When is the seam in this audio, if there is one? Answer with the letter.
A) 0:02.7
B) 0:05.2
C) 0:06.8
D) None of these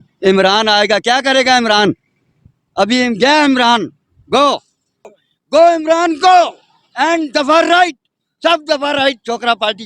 B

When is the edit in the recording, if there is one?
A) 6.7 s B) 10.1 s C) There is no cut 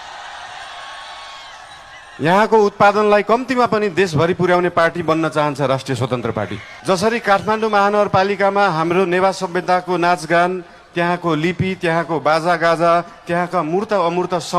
A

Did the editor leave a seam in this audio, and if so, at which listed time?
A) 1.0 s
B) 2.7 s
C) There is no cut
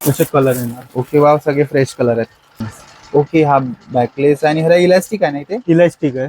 B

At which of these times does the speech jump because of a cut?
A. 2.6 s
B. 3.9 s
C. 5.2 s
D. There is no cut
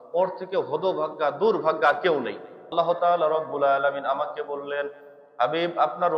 A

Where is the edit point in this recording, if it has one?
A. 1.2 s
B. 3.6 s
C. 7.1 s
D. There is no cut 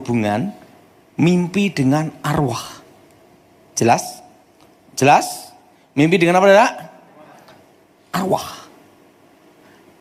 D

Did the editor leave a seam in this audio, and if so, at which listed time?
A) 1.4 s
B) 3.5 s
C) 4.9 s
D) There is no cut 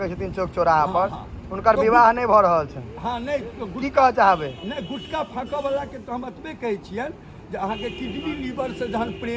D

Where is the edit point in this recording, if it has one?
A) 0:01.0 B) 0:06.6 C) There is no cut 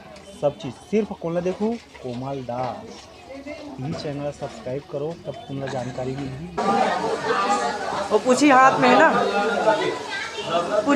B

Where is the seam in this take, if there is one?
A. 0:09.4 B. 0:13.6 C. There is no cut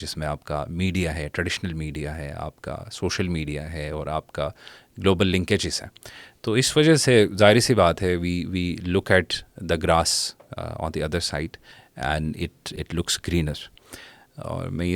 C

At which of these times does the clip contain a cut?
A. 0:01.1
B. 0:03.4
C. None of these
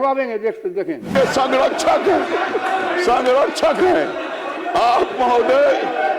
A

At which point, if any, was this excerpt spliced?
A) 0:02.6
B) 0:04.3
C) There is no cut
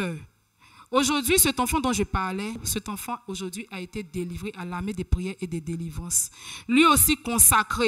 A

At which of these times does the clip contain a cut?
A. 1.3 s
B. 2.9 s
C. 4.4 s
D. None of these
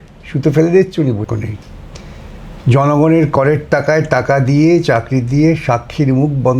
A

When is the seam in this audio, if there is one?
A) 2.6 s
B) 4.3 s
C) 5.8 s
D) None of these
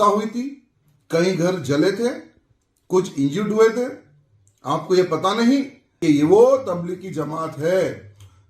C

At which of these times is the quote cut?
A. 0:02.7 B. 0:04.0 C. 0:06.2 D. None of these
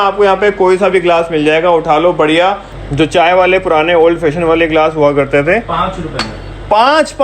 A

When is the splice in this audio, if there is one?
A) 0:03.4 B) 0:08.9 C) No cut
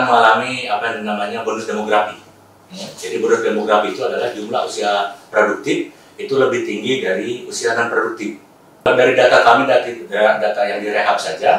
B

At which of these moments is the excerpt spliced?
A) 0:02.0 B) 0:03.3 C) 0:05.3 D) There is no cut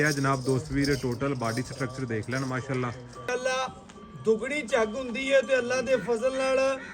B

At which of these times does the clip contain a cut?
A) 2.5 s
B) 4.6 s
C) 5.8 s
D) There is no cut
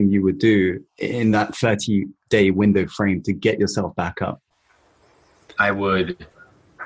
B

